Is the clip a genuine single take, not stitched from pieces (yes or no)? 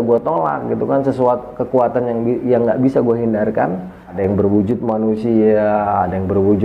no